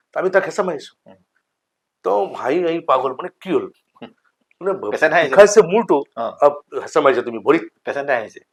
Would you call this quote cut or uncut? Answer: uncut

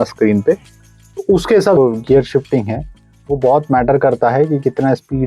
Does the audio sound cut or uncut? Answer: cut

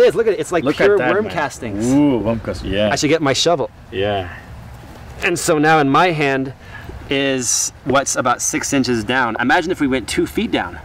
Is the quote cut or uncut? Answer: uncut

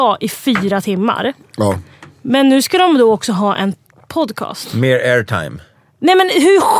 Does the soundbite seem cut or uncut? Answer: cut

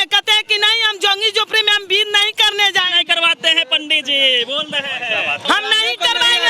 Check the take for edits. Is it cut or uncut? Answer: cut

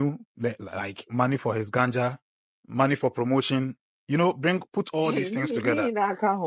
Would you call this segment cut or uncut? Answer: uncut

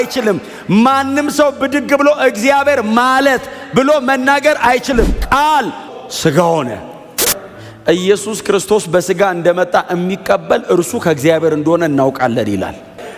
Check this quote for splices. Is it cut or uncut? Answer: cut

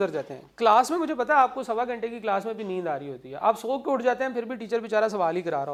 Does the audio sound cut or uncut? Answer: uncut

